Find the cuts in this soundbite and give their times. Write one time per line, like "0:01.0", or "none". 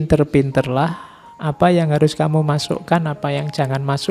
none